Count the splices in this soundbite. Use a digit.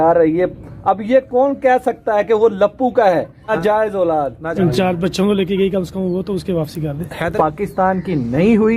3